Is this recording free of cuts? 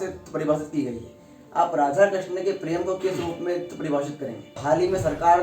no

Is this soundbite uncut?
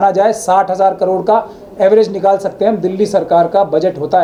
yes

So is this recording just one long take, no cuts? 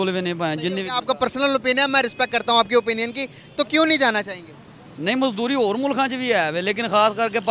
yes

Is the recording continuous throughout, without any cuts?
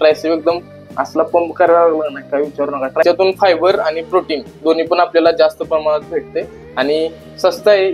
no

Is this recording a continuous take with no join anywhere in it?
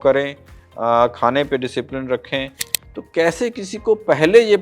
no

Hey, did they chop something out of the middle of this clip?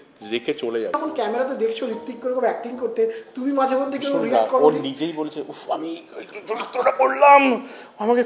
yes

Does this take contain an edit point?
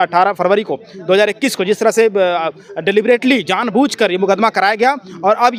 no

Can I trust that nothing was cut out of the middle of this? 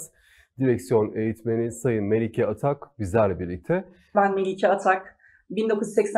no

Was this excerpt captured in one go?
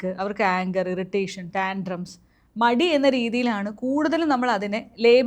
yes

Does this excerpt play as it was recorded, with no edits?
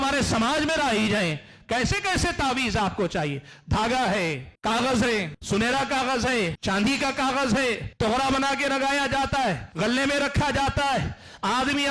no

